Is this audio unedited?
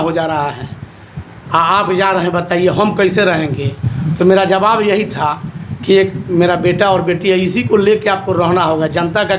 yes; 0 cuts

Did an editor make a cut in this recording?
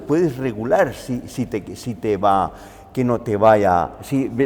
no; 0 cuts

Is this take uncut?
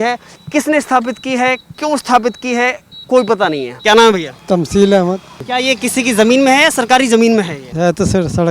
no; 3 cuts; at 3.7 s, 5.4 s, 7.6 s

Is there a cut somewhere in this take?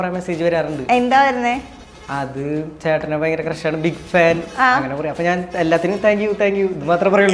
no; 0 cuts

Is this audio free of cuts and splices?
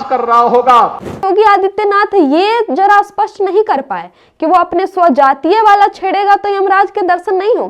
no; 1 cut; at 1.2 s

